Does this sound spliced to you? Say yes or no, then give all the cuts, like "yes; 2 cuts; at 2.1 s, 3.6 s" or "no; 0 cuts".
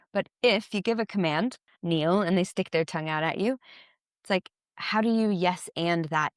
yes; 1 cut; at 1.7 s